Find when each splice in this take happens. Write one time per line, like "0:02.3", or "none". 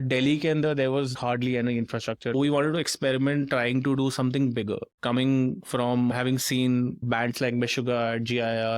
0:01.1
0:02.3
0:04.9